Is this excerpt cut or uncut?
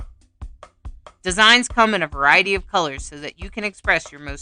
cut